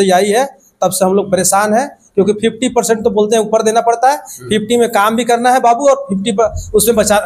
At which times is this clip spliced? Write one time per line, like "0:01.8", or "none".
none